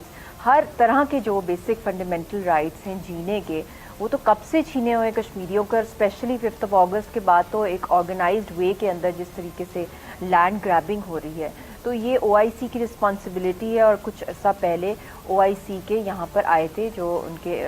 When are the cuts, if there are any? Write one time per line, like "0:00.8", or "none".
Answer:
none